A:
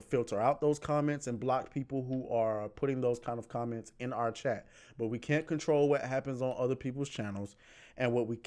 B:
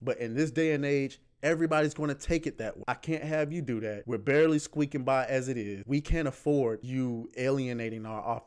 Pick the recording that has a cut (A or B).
B